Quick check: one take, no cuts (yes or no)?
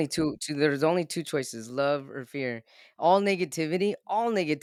yes